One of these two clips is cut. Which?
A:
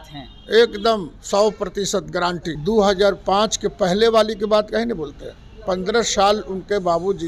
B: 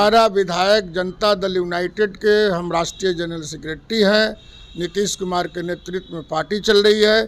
A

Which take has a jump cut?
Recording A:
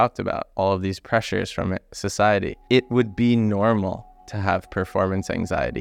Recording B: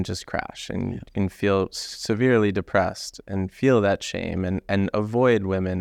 A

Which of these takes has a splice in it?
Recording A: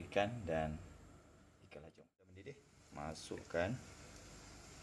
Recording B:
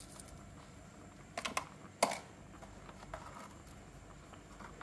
A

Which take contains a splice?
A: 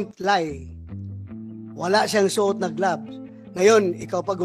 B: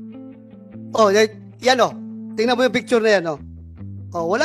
B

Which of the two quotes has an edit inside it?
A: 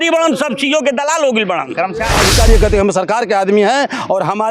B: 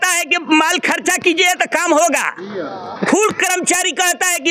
A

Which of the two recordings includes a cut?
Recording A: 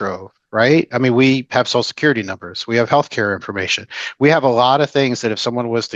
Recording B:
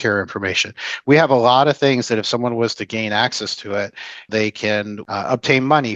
B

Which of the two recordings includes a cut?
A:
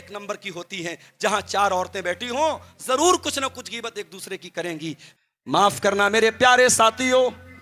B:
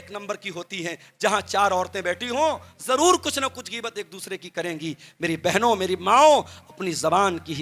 A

